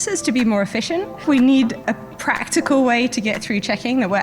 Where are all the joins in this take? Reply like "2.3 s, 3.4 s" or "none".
1.2 s, 1.8 s